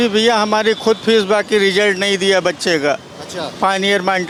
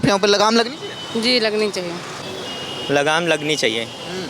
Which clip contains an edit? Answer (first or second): second